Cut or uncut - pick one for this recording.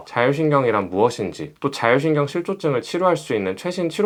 uncut